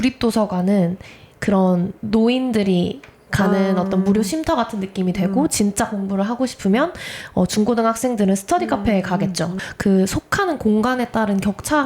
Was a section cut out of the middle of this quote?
yes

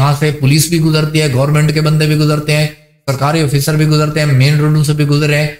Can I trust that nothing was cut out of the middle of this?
yes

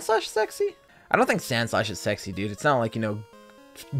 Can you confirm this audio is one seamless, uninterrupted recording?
no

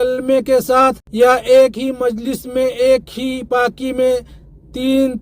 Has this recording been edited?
yes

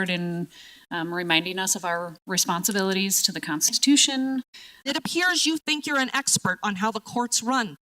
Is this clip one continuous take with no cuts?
no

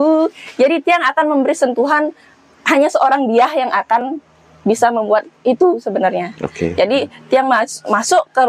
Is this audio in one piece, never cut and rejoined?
yes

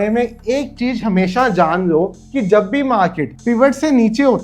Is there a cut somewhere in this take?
no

